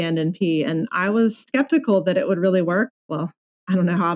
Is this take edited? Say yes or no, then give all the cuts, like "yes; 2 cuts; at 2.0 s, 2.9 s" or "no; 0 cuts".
yes; 2 cuts; at 1.5 s, 2.9 s